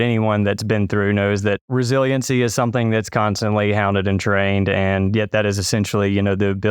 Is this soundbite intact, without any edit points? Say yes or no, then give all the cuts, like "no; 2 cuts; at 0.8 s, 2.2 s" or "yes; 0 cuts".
yes; 0 cuts